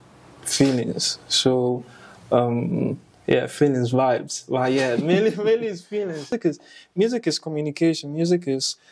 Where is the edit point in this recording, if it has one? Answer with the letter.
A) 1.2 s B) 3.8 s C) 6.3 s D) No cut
C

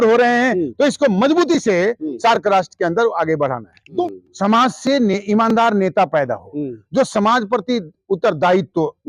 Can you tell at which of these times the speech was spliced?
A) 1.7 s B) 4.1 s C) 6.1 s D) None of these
B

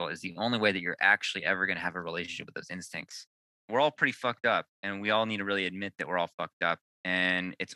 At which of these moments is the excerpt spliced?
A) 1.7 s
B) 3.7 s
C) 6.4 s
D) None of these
B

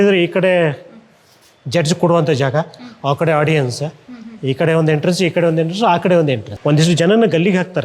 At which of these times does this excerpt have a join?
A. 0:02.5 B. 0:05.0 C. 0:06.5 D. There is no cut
C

